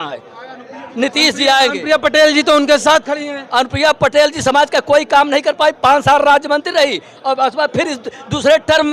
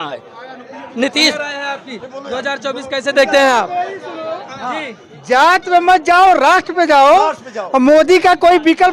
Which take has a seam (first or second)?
second